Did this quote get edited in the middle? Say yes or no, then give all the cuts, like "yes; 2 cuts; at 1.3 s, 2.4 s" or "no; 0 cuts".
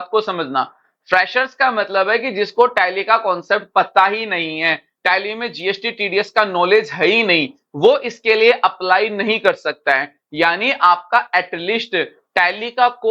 no; 0 cuts